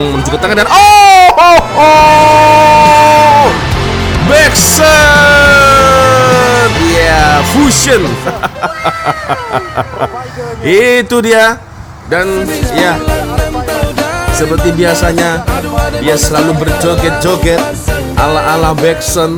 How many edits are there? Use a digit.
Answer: 0